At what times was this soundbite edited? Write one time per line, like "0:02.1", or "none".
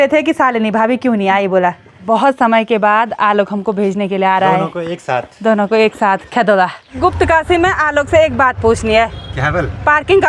0:01.9
0:07.0